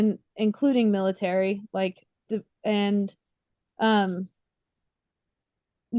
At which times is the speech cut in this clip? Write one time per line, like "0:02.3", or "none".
none